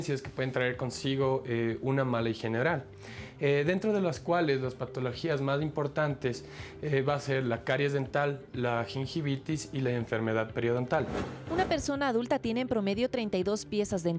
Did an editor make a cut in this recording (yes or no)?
yes